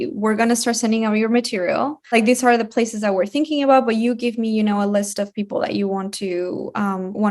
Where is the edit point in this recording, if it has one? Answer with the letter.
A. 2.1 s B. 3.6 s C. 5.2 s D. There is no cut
A